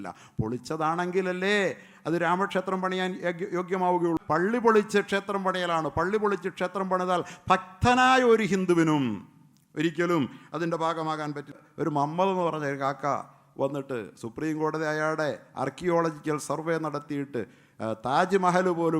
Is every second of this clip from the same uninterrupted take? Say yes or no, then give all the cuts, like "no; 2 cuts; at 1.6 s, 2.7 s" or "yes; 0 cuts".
no; 2 cuts; at 4.2 s, 11.7 s